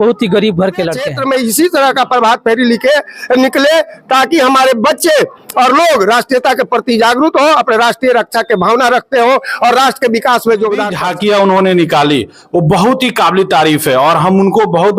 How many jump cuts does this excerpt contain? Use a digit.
2